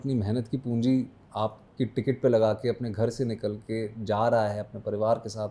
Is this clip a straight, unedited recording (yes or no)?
yes